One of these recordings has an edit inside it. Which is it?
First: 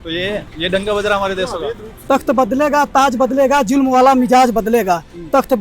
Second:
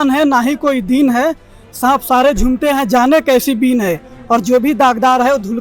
first; 1 cut; at 2.0 s

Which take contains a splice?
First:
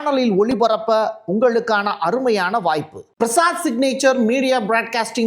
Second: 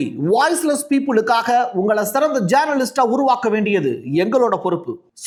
first; 1 cut; at 3.0 s

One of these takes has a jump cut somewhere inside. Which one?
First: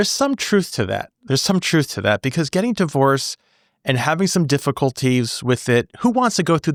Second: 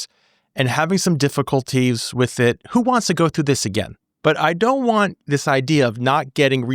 second; 1 cut; at 5.2 s

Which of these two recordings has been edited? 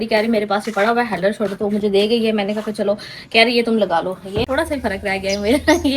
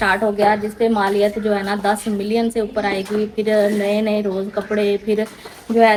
first; 1 cut; at 4.4 s

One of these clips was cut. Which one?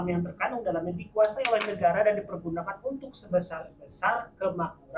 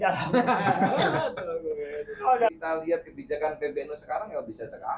second; 1 cut; at 2.5 s

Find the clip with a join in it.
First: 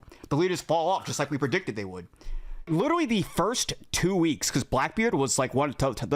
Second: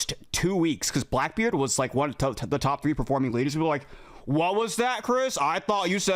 first; 1 cut; at 2.7 s

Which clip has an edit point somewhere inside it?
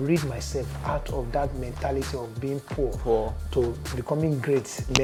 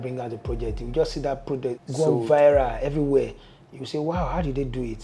second; 1 cut; at 1.8 s

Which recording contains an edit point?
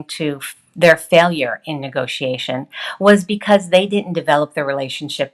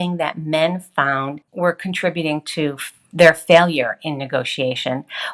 second; 1 cut; at 1.4 s

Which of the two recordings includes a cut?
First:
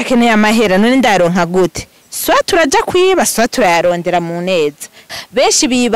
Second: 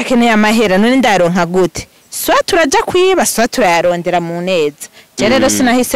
first; 1 cut; at 5.0 s

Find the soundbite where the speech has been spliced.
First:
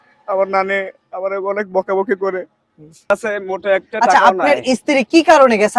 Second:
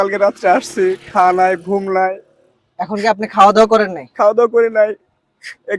first; 1 cut; at 3.1 s

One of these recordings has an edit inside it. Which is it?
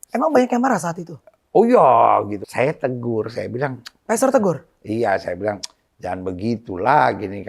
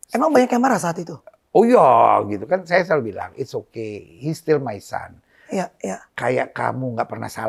first; 1 cut; at 2.4 s

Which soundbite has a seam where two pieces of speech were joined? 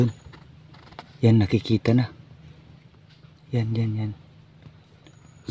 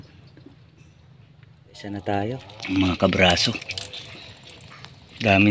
second; 1 cut; at 2.0 s

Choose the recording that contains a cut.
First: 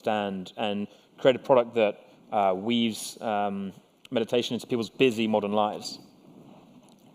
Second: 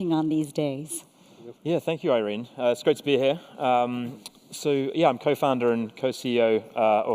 first; 1 cut; at 3.7 s

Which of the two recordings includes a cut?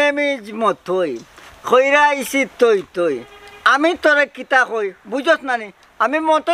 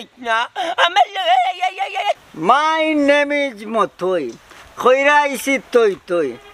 second; 1 cut; at 2.2 s

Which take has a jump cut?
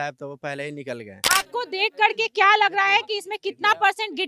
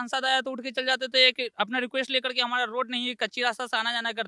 first; 1 cut; at 1.1 s

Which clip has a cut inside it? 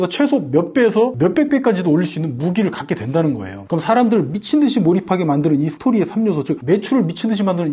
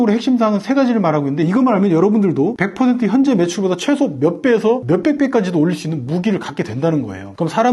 second; 1 cut; at 1.4 s

